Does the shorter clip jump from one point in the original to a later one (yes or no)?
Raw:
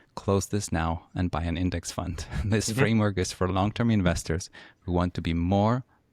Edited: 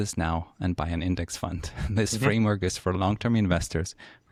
no